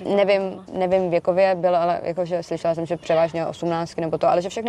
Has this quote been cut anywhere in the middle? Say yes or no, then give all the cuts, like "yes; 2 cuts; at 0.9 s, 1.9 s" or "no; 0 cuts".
no; 0 cuts